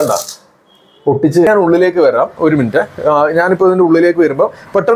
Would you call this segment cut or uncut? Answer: cut